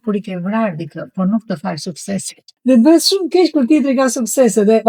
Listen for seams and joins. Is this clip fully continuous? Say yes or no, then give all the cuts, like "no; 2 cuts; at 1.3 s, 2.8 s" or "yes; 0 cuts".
yes; 0 cuts